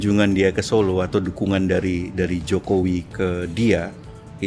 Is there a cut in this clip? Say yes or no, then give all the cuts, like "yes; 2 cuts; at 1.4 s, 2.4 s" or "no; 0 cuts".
no; 0 cuts